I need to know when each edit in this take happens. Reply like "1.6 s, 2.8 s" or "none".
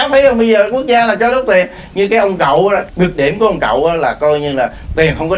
2.9 s

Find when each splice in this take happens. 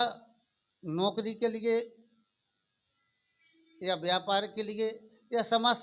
none

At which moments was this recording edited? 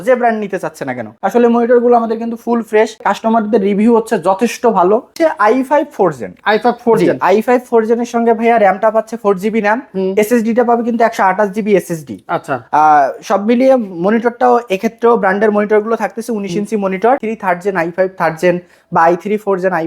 1.1 s, 3.0 s, 5.2 s, 17.2 s

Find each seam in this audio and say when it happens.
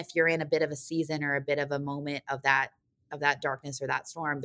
none

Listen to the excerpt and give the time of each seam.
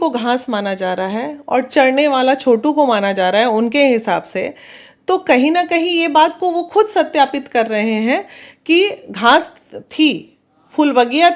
none

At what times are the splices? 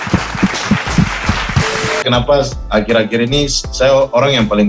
2.0 s

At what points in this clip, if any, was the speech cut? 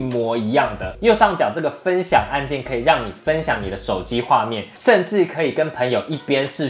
0.9 s, 4.6 s

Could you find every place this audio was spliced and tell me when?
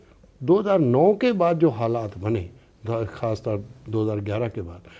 none

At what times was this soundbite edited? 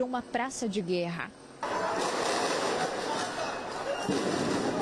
1.4 s

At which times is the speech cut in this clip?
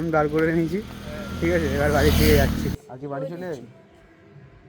2.8 s

